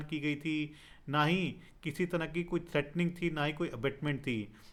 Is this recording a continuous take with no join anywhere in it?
yes; 0 cuts

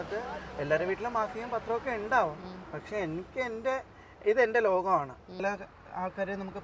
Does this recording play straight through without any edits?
no; 1 cut; at 5.4 s

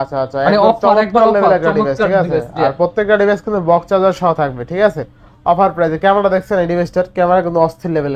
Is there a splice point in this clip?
no; 0 cuts

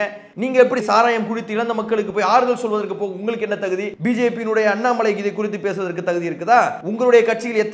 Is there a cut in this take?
yes; 2 cuts; at 3.9 s, 6.8 s

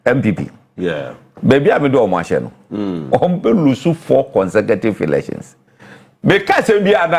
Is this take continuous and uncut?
yes; 0 cuts

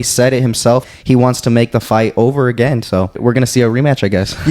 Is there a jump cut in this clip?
yes; 2 cuts; at 0.9 s, 3.2 s

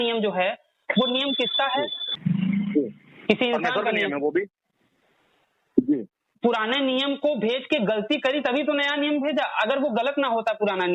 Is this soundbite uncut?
no; 2 cuts; at 2.0 s, 6.3 s

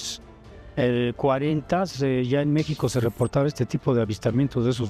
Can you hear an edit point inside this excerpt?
no; 0 cuts

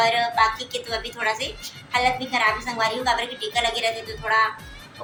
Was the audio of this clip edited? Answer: no; 0 cuts

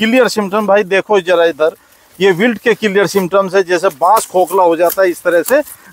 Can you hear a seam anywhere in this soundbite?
no; 0 cuts

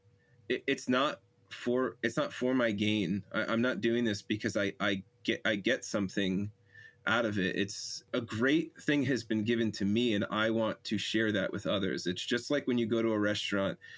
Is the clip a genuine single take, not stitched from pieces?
no; 1 cut; at 8.1 s

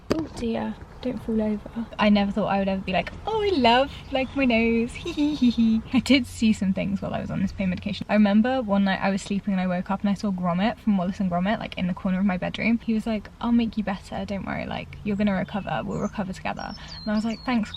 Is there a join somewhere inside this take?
yes; 3 cuts; at 1.8 s, 5.9 s, 12.8 s

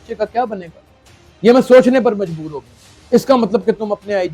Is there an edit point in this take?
yes; 1 cut; at 3.0 s

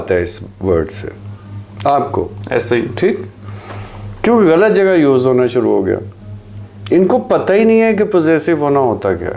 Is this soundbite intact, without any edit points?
yes; 0 cuts

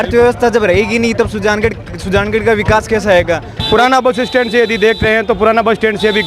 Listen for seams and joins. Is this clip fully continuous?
no; 1 cut; at 3.5 s

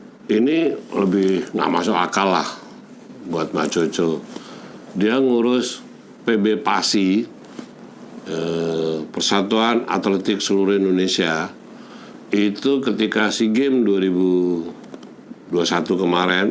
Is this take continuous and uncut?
yes; 0 cuts

